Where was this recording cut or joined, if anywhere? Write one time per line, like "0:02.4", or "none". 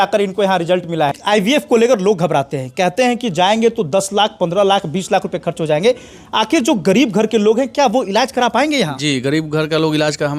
0:01.1